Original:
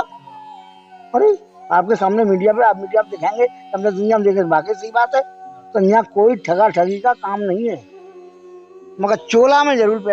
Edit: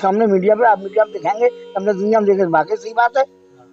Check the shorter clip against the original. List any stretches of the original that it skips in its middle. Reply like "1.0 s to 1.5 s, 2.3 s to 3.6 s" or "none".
none